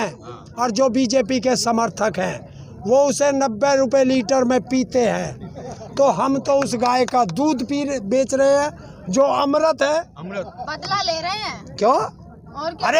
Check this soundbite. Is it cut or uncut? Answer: uncut